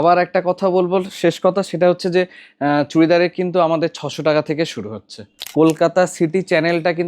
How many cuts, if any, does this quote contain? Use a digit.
1